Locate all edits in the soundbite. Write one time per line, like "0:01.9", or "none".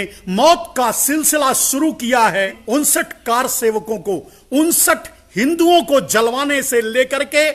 0:02.6